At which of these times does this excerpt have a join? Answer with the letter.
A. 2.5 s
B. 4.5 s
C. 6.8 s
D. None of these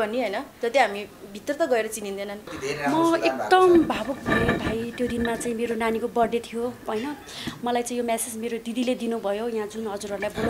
A